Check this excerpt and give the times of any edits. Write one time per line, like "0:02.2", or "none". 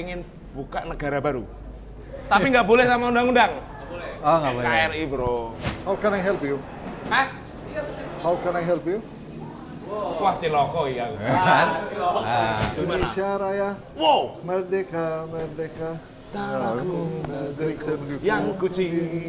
0:02.1
0:05.6
0:12.6